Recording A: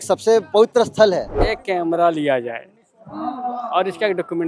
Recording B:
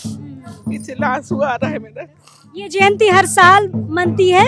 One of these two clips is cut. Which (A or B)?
A